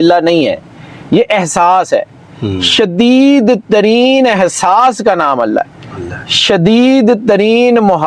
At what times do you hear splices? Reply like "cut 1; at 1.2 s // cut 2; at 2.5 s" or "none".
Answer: none